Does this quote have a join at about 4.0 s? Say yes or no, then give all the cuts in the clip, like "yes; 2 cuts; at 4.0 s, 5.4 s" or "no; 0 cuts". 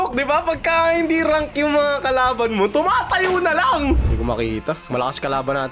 yes; 1 cut; at 4.0 s